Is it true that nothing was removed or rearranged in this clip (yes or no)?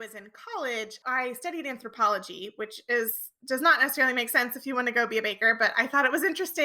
yes